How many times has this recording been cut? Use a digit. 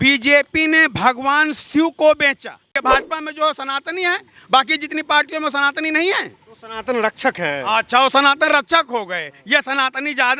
1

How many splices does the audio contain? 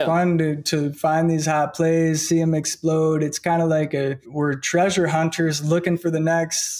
1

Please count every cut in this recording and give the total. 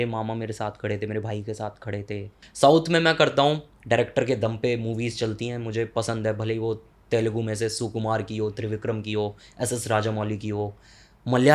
1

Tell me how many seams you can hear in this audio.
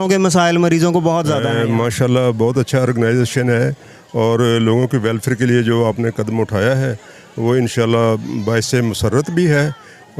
1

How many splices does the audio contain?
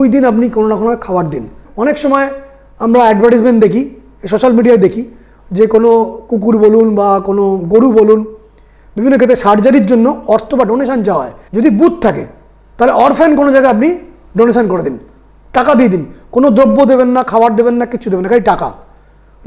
2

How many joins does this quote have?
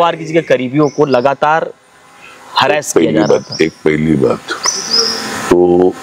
0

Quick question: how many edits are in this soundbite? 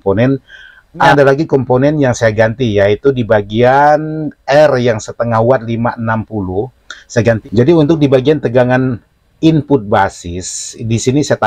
2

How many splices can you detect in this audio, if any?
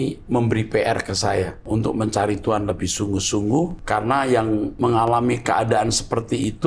3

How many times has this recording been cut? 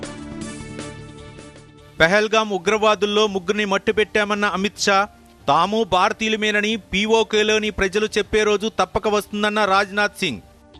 1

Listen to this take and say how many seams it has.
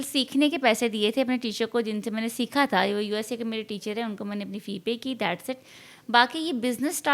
0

